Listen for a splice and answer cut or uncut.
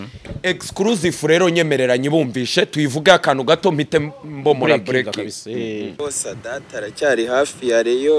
cut